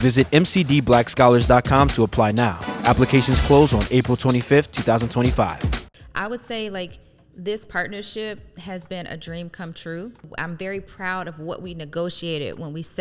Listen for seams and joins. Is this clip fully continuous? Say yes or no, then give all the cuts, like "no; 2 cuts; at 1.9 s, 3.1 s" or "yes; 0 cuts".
no; 2 cuts; at 6.0 s, 10.3 s